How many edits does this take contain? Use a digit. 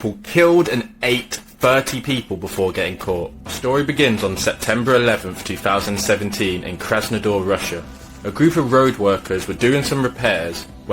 1